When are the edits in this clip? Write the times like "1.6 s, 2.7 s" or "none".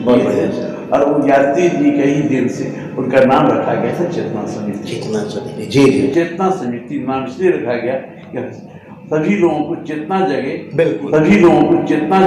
6.1 s, 11.1 s